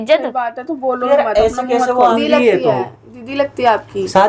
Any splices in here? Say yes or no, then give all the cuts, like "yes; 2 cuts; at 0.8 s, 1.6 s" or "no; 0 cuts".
yes; 1 cut; at 2.0 s